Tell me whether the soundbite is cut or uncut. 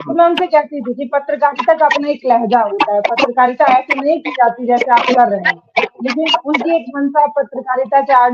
uncut